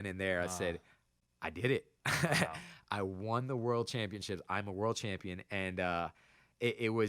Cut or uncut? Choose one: uncut